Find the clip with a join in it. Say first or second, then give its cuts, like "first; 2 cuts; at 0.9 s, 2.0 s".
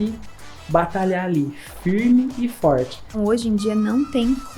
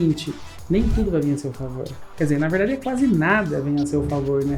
first; 1 cut; at 3.2 s